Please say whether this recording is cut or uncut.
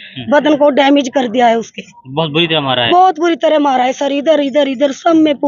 uncut